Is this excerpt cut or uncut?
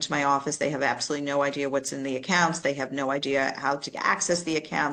uncut